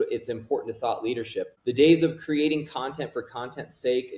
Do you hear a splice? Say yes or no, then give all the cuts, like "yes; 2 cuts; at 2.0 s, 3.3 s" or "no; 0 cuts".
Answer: yes; 1 cut; at 1.5 s